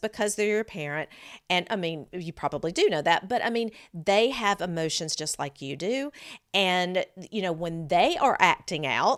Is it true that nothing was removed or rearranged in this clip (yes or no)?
yes